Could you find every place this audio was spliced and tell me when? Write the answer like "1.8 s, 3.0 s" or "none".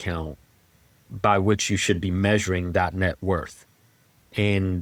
none